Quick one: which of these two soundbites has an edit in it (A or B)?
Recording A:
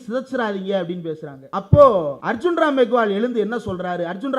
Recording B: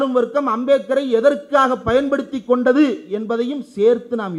A